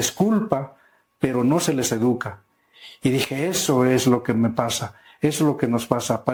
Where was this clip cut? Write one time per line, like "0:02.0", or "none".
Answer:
none